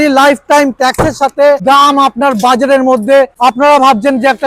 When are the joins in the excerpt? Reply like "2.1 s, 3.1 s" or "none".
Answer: 1.6 s, 3.3 s